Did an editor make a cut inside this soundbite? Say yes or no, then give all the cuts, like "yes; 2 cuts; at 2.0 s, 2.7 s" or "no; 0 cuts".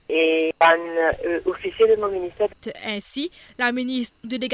no; 0 cuts